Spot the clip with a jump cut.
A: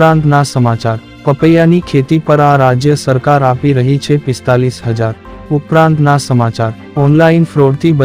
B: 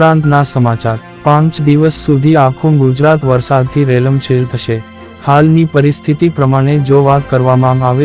A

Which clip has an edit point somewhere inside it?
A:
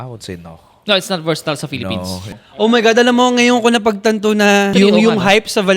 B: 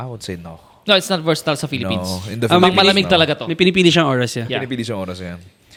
A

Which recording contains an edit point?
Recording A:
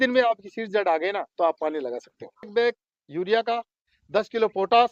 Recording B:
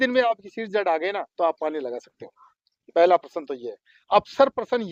A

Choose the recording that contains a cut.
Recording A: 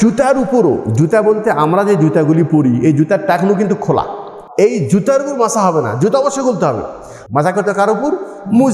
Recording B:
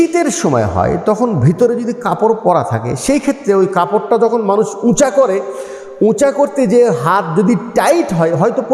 A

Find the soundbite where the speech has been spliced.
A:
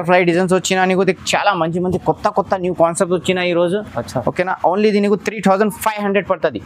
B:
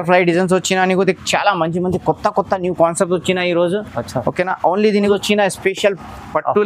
B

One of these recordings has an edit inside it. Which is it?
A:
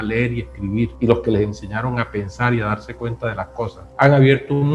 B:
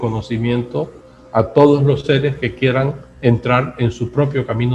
A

